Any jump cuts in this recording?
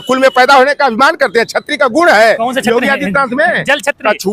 no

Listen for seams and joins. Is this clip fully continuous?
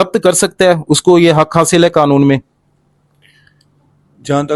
yes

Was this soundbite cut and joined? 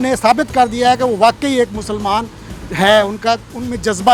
no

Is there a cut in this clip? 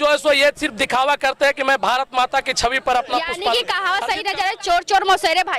yes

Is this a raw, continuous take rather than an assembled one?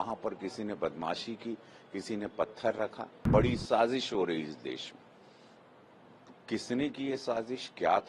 no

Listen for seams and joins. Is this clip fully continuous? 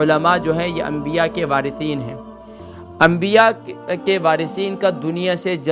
yes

